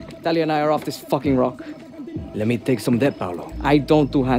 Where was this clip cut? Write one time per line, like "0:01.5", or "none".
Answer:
none